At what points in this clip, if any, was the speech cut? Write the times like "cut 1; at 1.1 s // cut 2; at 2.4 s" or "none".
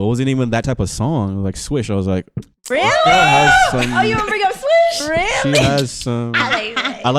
none

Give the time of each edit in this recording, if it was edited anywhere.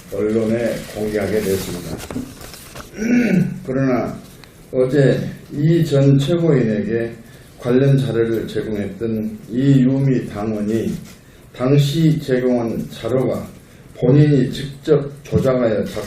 cut 1; at 6.4 s

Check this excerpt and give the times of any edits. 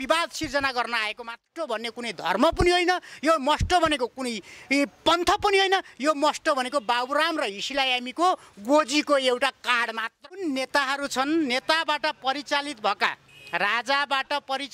cut 1; at 1.4 s // cut 2; at 10.1 s

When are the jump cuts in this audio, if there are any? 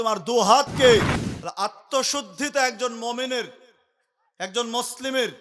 cut 1; at 1.2 s

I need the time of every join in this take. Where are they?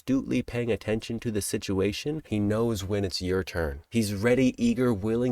cut 1; at 2.2 s // cut 2; at 3.9 s

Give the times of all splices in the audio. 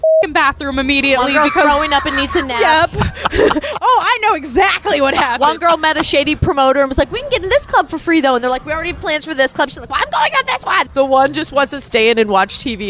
cut 1; at 6.4 s // cut 2; at 10.8 s // cut 3; at 11.9 s

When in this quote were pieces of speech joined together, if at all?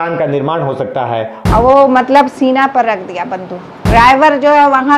cut 1; at 1.3 s // cut 2; at 3.7 s

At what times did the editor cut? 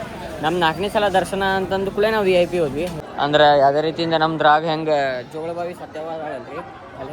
cut 1; at 2.9 s

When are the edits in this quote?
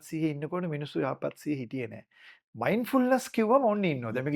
none

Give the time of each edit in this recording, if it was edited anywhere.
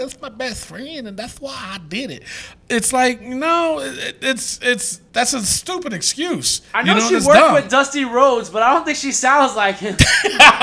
cut 1; at 5.0 s // cut 2; at 6.6 s

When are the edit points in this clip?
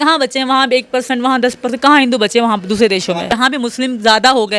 cut 1; at 3.4 s

